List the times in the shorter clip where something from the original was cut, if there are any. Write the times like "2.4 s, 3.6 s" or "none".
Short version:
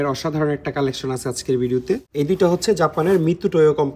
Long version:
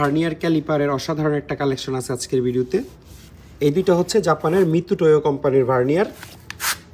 2.1 s